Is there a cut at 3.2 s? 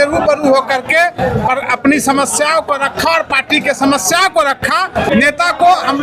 no; 1 cut; at 5.1 s

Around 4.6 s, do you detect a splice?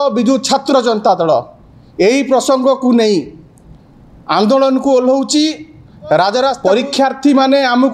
no; 1 cut; at 6.6 s

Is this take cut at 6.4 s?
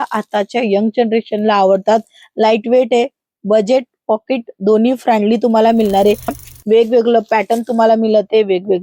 yes; 1 cut; at 6.4 s

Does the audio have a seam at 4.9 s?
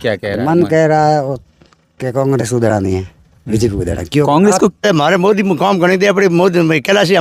yes; 1 cut; at 4.9 s

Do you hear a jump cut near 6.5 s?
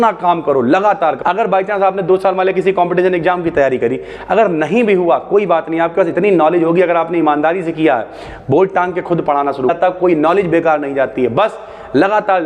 no; 2 cuts; at 1.2 s, 9.7 s

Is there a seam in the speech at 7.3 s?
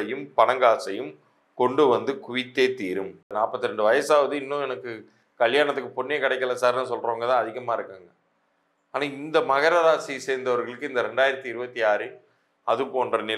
no; 1 cut; at 3.3 s

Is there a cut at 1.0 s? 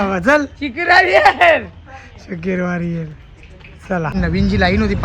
no; 1 cut; at 4.1 s

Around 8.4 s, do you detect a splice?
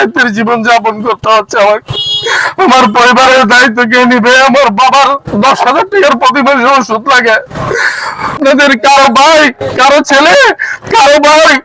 yes; 1 cut; at 8.4 s

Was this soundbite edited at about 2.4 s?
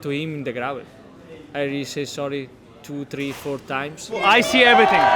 no; 1 cut; at 4.2 s

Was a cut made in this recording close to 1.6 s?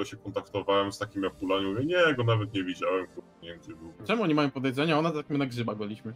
no; 1 cut; at 3.9 s

